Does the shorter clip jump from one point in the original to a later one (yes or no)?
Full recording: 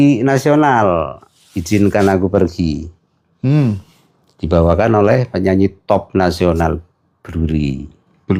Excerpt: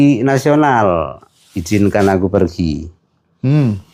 no